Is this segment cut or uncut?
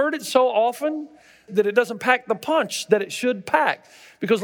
cut